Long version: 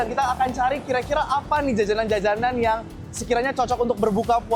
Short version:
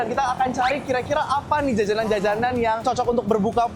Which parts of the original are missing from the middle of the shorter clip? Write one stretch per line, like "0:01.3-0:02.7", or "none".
0:02.8-0:03.5

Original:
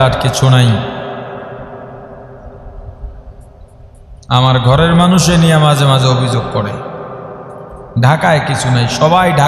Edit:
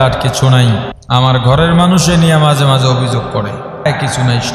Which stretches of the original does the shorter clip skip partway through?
0:00.9-0:04.1
0:07.1-0:08.3

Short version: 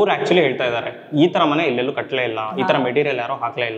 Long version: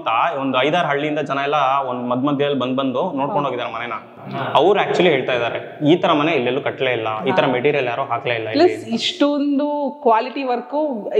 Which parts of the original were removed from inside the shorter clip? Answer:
none

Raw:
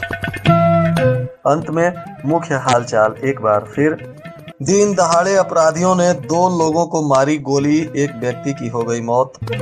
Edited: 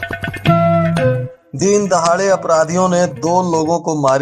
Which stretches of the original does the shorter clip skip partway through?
0:01.3-0:04.4

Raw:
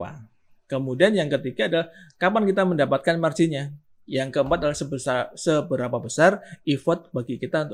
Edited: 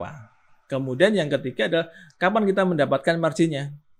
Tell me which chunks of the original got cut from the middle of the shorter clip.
none

